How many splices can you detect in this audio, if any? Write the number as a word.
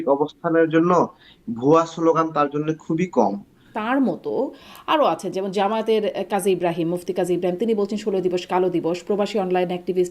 one